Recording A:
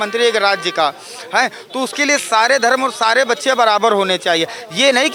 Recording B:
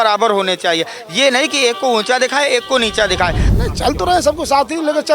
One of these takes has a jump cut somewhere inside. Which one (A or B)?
B